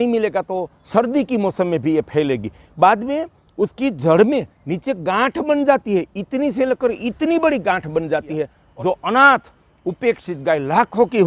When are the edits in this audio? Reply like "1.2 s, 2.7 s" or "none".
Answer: 8.6 s